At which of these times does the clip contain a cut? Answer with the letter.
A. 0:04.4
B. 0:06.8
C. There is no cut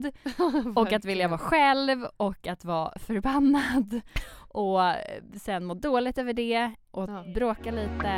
B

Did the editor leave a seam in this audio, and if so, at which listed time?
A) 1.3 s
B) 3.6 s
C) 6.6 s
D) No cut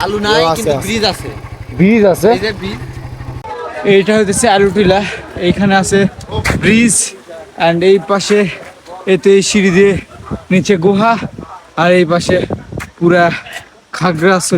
B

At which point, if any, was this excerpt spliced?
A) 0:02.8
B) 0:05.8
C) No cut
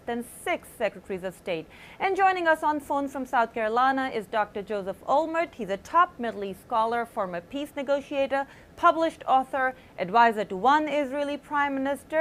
B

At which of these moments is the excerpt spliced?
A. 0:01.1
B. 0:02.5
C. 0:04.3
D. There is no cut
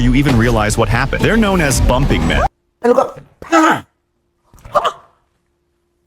B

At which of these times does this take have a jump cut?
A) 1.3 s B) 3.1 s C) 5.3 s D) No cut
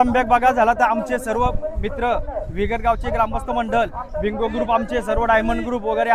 D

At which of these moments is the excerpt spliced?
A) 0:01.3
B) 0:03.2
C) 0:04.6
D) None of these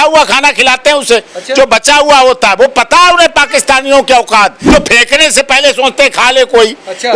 C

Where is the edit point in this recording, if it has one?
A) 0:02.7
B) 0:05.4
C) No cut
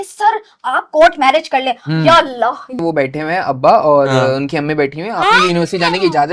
A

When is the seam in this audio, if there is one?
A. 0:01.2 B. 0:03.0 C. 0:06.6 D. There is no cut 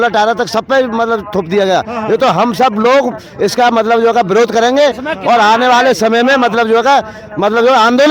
D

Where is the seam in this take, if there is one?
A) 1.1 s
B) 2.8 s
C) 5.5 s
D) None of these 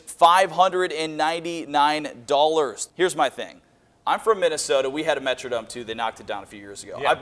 B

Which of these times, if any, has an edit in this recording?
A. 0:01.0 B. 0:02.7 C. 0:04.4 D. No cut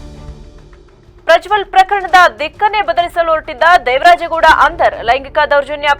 A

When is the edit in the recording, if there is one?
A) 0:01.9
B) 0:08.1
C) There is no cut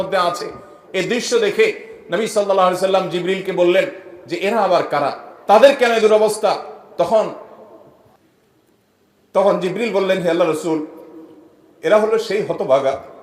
B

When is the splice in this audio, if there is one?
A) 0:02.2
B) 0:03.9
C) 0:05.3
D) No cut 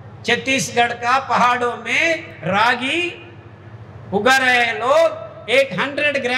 D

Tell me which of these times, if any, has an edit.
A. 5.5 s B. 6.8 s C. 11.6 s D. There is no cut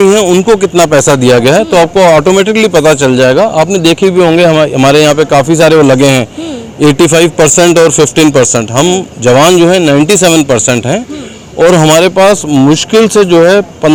D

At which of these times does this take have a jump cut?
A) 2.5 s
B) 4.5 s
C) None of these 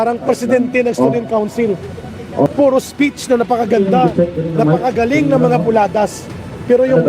A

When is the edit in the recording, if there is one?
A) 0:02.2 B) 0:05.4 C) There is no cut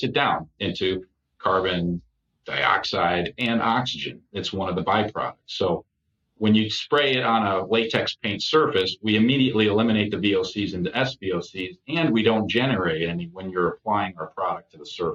C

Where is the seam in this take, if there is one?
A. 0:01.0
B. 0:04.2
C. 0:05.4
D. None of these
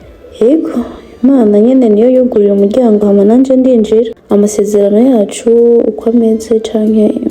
B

